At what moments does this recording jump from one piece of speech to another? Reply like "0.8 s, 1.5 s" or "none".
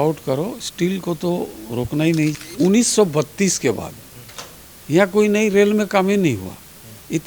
2.4 s

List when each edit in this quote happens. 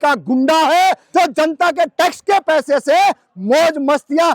1.0 s

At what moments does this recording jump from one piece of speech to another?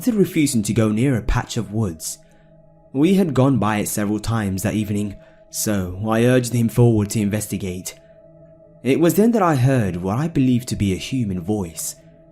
1.6 s

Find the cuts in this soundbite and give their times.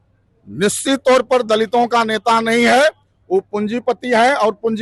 none

